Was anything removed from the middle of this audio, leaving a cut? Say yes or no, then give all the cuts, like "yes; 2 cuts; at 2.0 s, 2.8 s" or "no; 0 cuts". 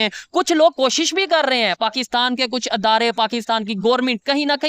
no; 0 cuts